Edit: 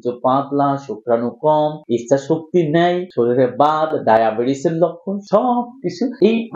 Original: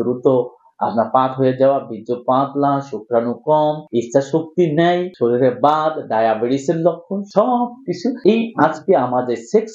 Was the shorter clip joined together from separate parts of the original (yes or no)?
no